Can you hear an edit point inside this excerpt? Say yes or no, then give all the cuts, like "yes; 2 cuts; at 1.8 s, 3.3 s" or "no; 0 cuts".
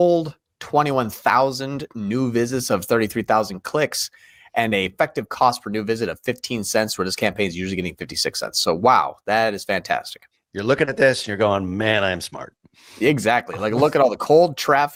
no; 0 cuts